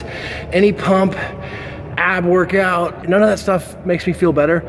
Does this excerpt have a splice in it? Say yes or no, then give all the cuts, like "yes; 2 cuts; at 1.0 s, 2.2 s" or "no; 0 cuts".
yes; 1 cut; at 3.0 s